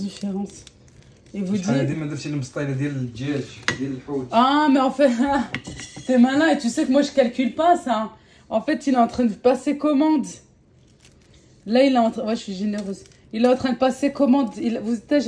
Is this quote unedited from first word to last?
yes; 0 cuts

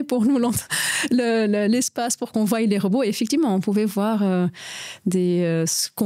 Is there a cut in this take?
no; 0 cuts

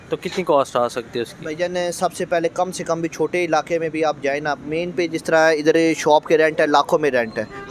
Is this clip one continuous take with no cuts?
yes; 0 cuts

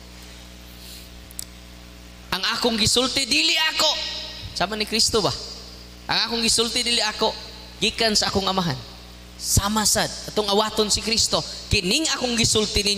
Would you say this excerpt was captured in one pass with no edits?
yes; 0 cuts

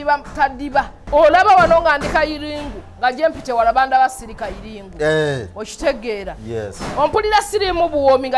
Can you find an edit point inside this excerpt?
yes; 1 cut; at 1.0 s

